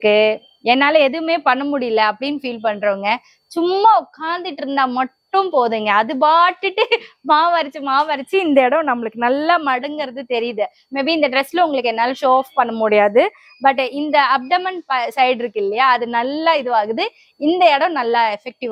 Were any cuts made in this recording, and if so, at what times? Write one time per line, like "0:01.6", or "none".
none